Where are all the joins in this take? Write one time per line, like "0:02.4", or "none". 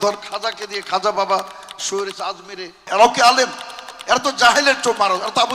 0:02.8